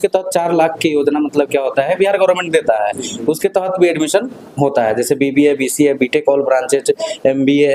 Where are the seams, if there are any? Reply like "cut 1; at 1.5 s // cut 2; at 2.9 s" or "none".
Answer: none